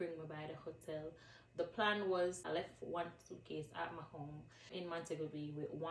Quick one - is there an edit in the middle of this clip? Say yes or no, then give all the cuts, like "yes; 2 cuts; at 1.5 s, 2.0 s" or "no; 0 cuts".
yes; 2 cuts; at 2.4 s, 4.7 s